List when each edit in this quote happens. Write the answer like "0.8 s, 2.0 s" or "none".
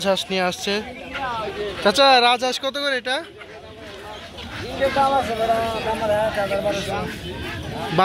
none